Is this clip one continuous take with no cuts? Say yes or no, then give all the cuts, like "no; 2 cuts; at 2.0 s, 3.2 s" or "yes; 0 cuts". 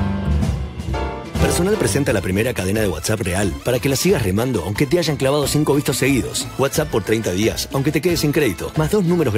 no; 1 cut; at 1.1 s